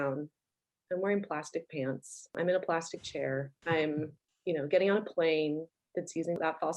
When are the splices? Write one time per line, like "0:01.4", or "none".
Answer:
0:03.5
0:04.2